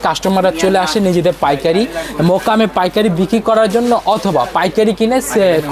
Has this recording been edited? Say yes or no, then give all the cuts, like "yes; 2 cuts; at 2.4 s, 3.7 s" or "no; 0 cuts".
no; 0 cuts